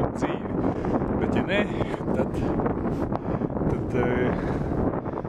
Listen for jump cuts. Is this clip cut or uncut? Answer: uncut